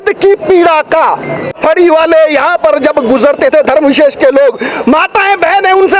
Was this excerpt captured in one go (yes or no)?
no